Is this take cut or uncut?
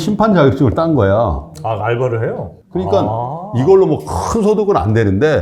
cut